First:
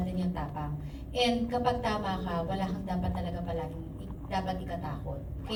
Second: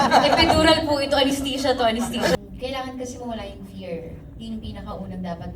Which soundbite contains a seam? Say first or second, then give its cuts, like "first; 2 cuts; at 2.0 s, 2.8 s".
second; 1 cut; at 2.3 s